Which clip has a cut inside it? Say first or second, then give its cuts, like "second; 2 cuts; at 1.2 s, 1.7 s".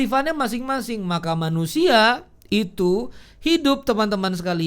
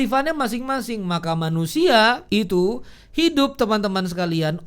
second; 1 cut; at 2.4 s